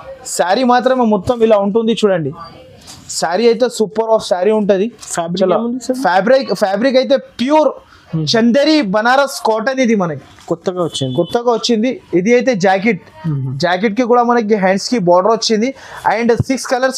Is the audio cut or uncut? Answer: uncut